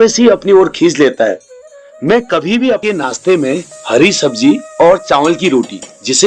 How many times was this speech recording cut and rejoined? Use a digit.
1